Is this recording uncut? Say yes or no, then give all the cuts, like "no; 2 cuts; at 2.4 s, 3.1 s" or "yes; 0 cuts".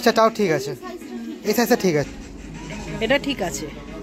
no; 1 cut; at 2.1 s